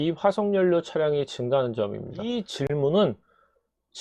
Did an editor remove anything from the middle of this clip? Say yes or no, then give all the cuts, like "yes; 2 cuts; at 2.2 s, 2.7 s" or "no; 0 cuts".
yes; 1 cut; at 2.6 s